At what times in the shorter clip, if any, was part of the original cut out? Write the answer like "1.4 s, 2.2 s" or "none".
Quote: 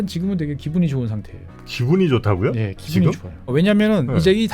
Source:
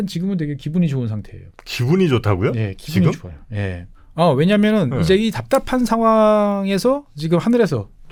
3.5 s